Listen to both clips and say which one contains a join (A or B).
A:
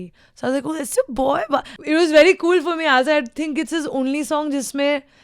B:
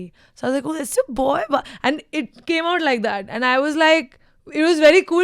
A